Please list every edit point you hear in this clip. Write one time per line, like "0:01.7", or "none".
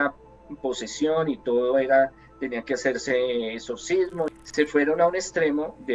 0:04.3